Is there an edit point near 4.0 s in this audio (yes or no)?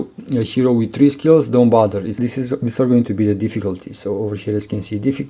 no